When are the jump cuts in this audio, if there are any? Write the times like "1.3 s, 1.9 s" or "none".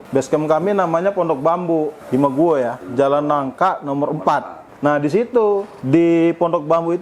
none